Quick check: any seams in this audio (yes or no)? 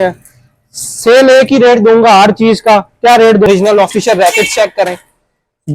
yes